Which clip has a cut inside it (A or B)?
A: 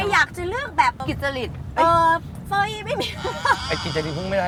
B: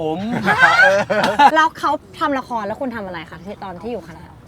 B